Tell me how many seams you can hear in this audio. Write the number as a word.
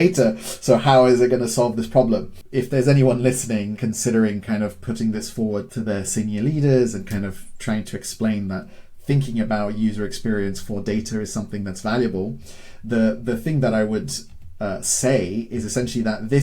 three